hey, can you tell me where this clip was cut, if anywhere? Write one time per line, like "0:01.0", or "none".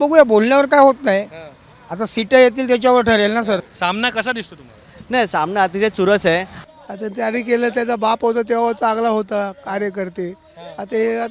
0:03.7
0:06.6